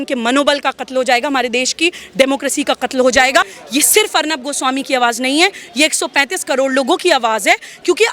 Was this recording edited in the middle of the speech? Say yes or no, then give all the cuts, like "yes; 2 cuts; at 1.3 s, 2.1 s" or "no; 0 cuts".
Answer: yes; 1 cut; at 3.6 s